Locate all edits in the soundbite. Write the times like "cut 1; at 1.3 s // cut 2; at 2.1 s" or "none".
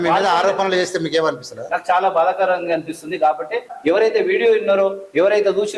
cut 1; at 3.7 s